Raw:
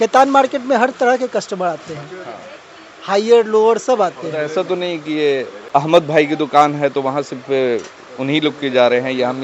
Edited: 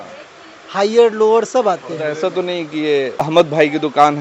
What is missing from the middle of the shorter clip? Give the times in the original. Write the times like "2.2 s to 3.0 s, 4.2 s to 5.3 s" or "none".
5.6 s to 5.8 s